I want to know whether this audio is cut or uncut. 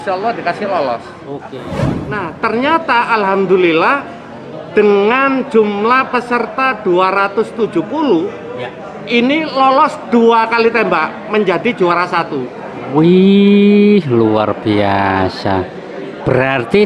cut